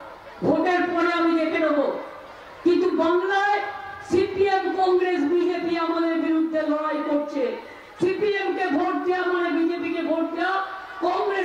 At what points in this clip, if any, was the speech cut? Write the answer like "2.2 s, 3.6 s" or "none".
none